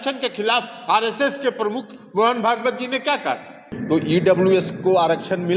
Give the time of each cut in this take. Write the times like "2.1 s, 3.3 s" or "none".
3.7 s